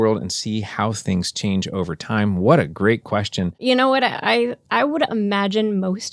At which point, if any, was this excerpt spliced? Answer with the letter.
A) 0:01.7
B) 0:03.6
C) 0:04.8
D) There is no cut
B